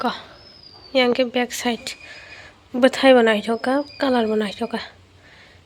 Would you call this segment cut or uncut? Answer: uncut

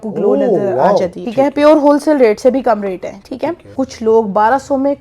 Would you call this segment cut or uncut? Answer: cut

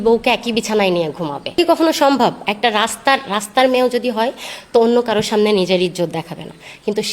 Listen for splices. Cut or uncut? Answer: cut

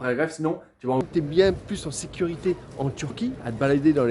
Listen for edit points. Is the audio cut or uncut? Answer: cut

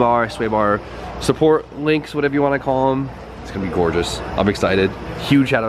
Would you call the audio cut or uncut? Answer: uncut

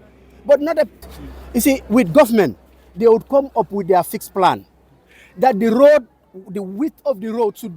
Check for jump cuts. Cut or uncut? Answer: cut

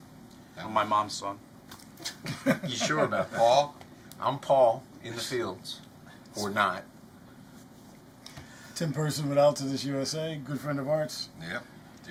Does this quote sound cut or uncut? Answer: uncut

